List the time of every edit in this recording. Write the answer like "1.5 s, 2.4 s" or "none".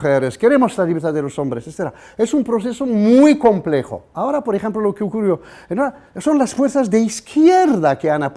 7.2 s